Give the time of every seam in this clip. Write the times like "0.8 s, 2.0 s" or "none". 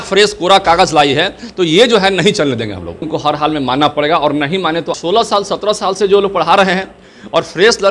3.1 s, 4.9 s